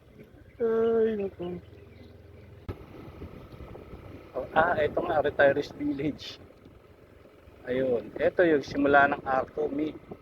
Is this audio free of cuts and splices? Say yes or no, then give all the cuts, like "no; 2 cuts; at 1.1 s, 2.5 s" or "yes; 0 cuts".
no; 1 cut; at 2.7 s